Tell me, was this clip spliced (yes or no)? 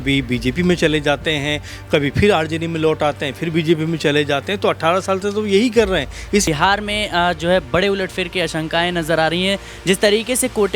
yes